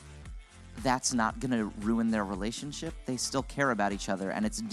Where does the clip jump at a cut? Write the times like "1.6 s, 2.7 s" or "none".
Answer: none